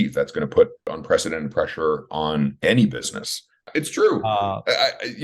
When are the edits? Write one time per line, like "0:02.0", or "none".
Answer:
0:00.9
0:02.6
0:03.6